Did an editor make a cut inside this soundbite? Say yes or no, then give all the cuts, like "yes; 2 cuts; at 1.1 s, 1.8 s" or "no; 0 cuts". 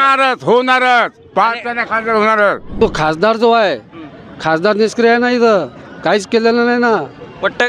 yes; 1 cut; at 2.7 s